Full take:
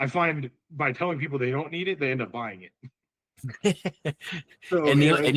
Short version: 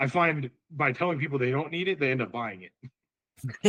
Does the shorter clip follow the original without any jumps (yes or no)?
yes